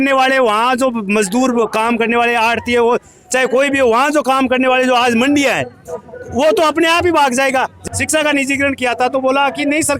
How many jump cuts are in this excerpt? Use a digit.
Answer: 1